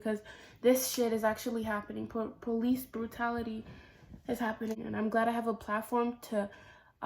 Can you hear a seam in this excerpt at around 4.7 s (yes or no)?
yes